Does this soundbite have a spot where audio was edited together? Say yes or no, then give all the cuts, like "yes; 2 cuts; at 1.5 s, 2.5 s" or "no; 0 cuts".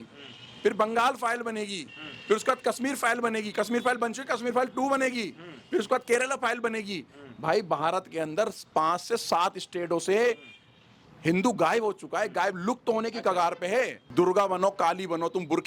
yes; 1 cut; at 14.0 s